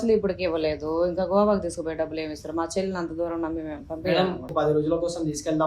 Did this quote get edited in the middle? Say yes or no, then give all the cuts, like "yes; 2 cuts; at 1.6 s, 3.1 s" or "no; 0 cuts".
yes; 1 cut; at 4.5 s